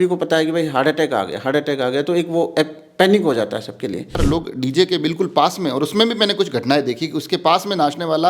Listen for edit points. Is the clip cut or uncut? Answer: cut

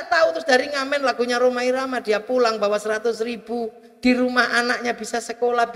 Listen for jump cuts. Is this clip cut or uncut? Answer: uncut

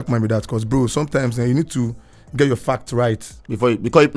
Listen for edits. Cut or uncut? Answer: uncut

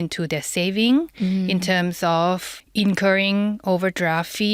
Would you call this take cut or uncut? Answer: cut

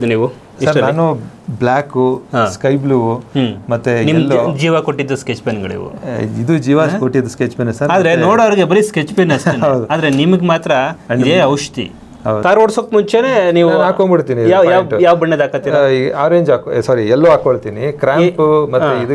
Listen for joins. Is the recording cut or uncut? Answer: cut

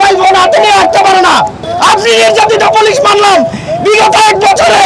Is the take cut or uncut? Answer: cut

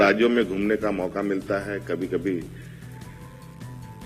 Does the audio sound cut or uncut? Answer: uncut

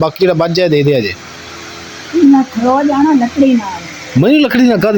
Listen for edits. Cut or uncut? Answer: uncut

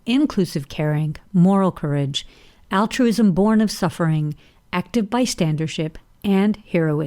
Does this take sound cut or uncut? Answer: uncut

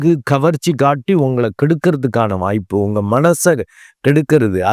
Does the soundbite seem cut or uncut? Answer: uncut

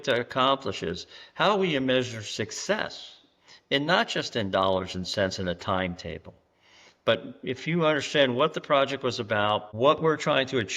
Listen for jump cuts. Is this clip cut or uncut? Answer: cut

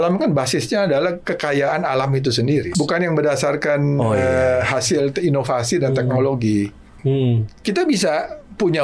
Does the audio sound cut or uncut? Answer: cut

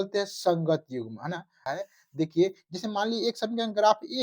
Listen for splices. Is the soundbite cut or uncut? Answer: cut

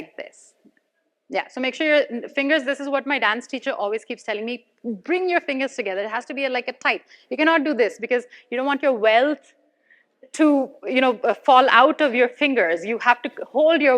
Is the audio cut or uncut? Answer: uncut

